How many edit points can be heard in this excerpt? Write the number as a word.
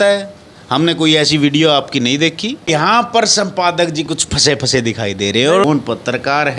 two